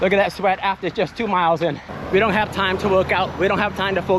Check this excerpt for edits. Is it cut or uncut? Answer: cut